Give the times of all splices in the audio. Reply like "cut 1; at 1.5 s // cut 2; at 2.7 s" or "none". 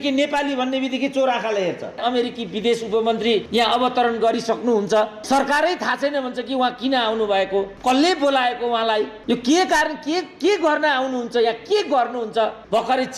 cut 1; at 2.0 s // cut 2; at 3.5 s